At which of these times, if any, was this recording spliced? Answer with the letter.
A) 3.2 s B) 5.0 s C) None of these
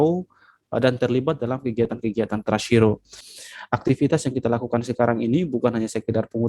A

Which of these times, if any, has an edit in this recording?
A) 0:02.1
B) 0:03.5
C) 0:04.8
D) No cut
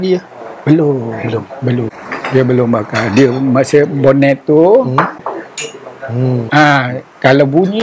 A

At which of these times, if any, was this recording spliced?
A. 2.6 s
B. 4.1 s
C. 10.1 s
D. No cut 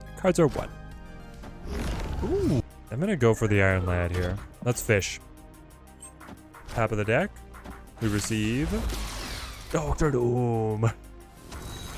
A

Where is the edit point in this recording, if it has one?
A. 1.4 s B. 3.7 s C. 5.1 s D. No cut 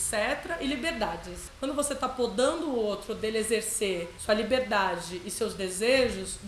A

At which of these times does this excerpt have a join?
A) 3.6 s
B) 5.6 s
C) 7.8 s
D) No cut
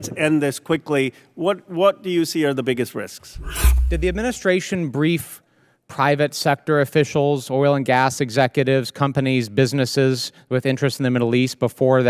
A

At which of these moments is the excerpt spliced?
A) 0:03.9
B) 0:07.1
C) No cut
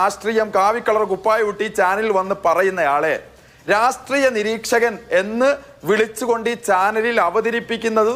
C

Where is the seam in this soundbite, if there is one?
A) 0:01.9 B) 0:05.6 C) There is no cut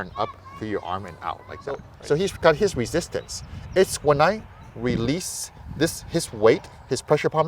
A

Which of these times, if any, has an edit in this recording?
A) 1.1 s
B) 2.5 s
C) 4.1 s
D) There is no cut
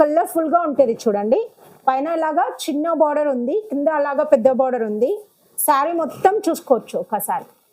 D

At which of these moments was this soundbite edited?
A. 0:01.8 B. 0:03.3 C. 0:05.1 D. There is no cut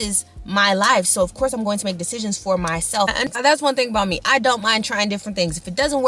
B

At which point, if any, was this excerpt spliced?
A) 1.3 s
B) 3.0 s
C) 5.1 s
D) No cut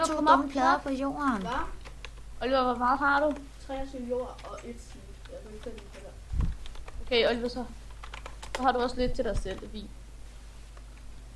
C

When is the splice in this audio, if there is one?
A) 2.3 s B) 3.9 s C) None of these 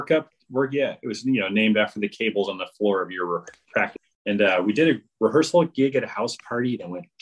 B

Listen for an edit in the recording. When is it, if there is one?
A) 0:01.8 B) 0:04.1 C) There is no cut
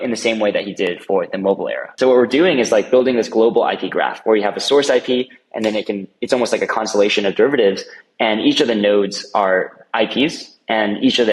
A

